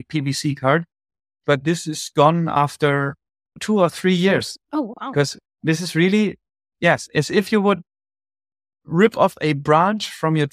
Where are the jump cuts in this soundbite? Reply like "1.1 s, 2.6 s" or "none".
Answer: 3.6 s, 5.4 s